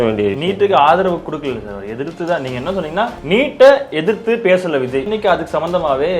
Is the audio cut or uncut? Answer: cut